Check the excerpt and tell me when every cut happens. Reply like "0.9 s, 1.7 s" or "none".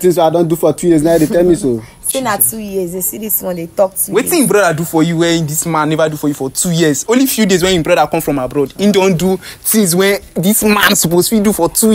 none